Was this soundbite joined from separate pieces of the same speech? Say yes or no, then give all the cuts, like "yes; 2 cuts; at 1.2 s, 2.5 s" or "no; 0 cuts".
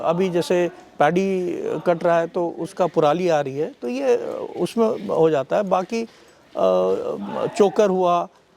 no; 0 cuts